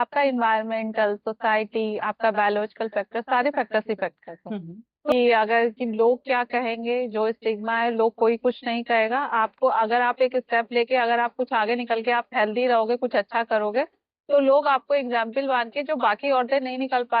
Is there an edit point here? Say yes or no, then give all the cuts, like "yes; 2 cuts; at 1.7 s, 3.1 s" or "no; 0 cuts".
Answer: yes; 1 cut; at 5.1 s